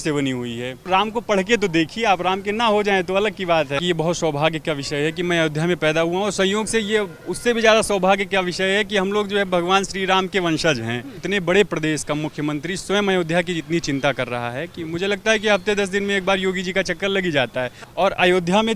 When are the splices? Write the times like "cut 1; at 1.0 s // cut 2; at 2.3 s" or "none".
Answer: cut 1; at 0.8 s // cut 2; at 3.8 s // cut 3; at 11.2 s // cut 4; at 17.8 s